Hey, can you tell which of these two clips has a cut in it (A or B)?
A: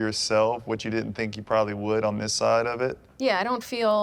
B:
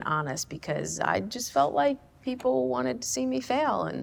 A